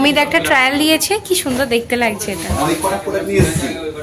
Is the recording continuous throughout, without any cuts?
yes; 0 cuts

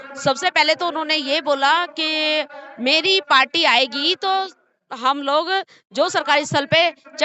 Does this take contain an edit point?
no; 0 cuts

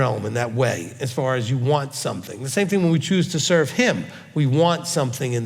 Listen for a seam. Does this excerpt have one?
no; 0 cuts

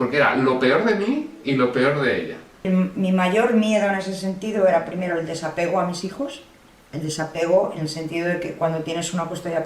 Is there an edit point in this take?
yes; 1 cut; at 2.7 s

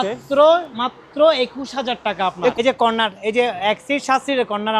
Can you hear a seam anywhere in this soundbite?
yes; 1 cut; at 2.5 s

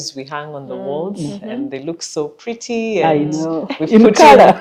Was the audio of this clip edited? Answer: no; 0 cuts

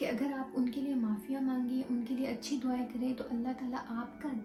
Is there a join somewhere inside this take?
no; 0 cuts

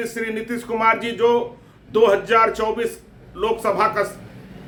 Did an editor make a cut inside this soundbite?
no; 0 cuts

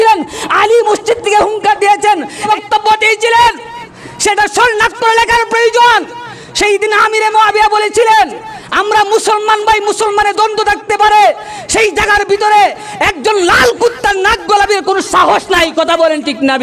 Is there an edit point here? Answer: yes; 1 cut; at 2.4 s

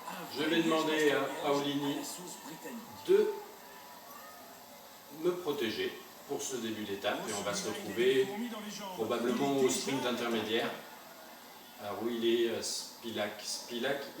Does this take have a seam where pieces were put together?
yes; 1 cut; at 7.4 s

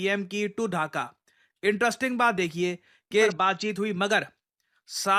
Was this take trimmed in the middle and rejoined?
yes; 1 cut; at 3.3 s

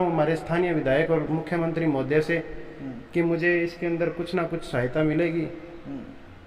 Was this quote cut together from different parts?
no; 0 cuts

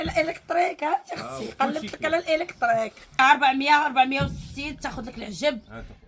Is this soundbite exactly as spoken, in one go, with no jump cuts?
no; 1 cut; at 3.2 s

